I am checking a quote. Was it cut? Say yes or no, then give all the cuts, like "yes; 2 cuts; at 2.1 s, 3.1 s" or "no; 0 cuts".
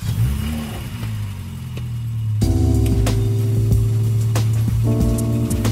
no; 0 cuts